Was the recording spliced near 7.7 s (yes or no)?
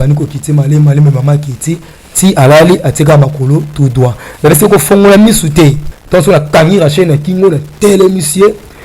no